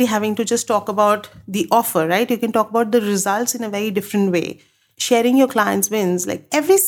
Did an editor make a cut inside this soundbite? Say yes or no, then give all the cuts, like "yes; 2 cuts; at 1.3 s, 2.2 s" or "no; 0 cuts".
yes; 1 cut; at 4.9 s